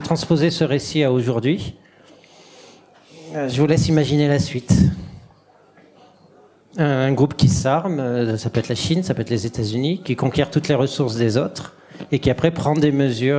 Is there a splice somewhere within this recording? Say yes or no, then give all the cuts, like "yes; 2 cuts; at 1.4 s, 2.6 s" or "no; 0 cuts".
no; 0 cuts